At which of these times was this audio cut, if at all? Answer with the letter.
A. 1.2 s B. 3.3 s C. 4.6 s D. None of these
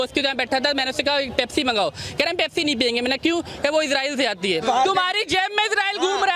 C